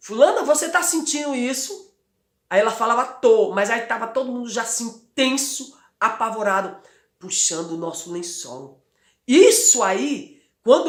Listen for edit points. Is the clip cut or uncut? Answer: uncut